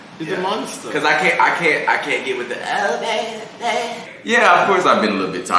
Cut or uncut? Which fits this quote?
cut